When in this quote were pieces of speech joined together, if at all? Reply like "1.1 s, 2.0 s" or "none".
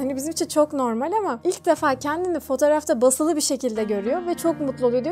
none